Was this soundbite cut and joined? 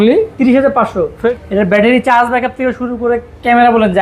yes; 1 cut; at 1.3 s

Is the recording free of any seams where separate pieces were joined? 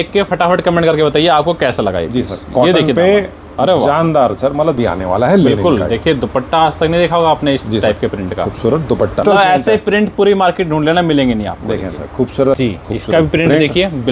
no; 3 cuts; at 4.8 s, 9.2 s, 12.6 s

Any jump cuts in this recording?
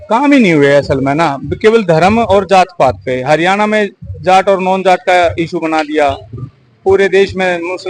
no; 0 cuts

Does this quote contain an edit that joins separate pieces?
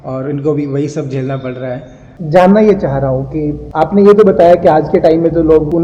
yes; 1 cut; at 2.1 s

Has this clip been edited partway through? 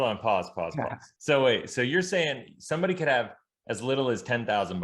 yes; 1 cut; at 1.0 s

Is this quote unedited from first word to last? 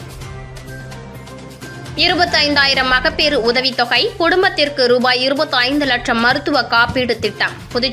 no; 1 cut; at 1.2 s

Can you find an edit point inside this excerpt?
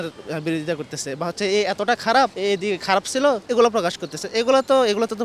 yes; 2 cuts; at 2.3 s, 3.4 s

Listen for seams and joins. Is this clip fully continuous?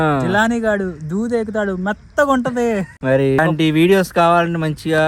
no; 1 cut; at 3.4 s

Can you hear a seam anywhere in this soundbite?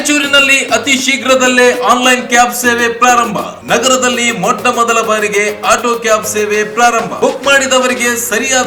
no; 0 cuts

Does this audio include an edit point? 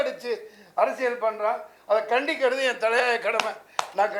no; 0 cuts

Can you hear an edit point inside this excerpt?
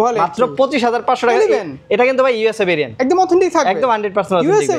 no; 0 cuts

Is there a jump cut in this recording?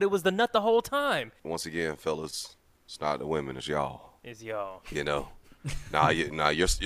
yes; 1 cut; at 1.4 s

